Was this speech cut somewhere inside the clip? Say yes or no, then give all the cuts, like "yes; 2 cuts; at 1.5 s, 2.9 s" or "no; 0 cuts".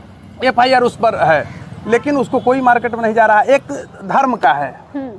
no; 0 cuts